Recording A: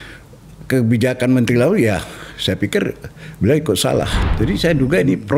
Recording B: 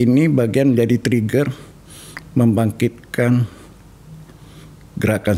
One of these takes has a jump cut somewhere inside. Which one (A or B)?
A